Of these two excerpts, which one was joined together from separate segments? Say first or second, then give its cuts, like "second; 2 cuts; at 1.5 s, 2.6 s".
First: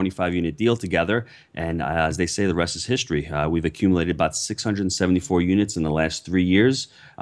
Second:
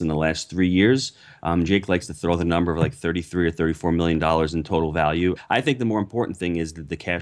second; 1 cut; at 5.4 s